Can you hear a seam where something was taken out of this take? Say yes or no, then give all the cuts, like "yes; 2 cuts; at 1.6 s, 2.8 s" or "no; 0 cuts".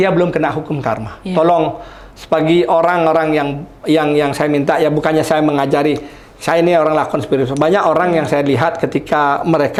no; 0 cuts